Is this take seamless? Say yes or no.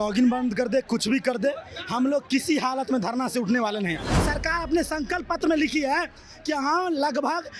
no